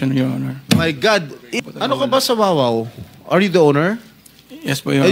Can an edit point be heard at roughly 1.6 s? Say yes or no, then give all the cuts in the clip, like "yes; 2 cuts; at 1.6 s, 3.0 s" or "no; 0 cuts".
yes; 1 cut; at 1.6 s